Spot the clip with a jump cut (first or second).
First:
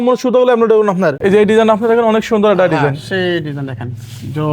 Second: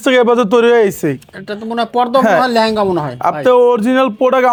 first